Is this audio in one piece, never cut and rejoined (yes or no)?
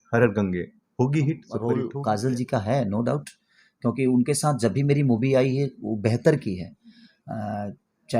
no